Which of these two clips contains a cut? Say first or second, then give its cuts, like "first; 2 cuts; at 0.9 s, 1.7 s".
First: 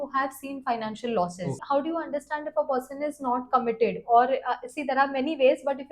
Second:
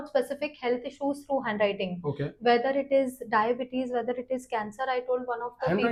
first; 1 cut; at 1.6 s